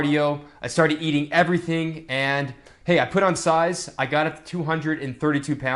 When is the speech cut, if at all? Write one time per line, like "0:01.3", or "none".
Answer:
none